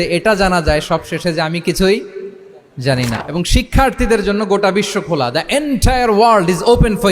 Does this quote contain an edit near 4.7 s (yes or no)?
no